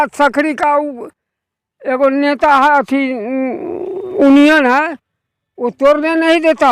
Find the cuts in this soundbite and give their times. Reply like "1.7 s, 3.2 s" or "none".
none